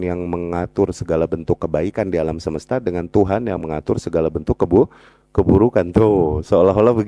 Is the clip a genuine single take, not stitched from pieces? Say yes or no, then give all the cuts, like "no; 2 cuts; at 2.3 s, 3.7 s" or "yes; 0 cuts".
yes; 0 cuts